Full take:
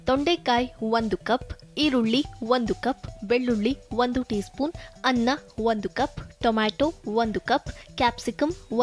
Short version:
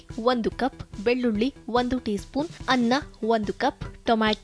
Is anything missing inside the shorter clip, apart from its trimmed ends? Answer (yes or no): yes